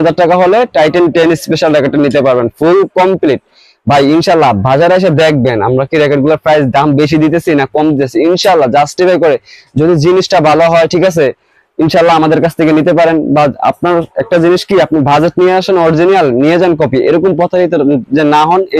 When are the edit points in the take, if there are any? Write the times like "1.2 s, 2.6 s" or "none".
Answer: none